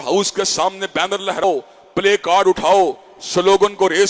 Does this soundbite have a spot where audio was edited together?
yes; 1 cut; at 1.4 s

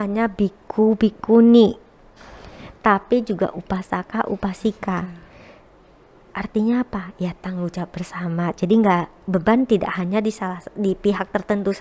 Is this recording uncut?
yes; 0 cuts

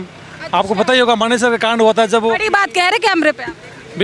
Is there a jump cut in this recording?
no; 0 cuts

